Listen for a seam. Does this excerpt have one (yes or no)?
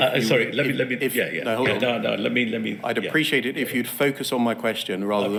no